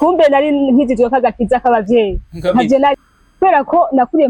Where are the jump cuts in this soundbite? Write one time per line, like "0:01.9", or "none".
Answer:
0:03.0